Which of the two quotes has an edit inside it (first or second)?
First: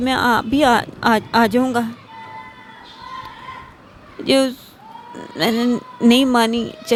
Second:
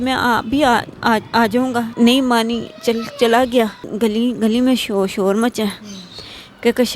second